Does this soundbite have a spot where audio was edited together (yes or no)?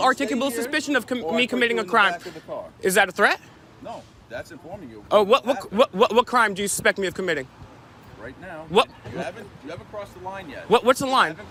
no